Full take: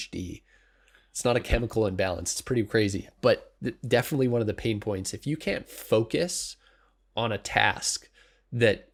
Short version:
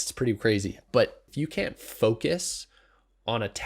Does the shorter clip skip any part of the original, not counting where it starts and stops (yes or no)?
yes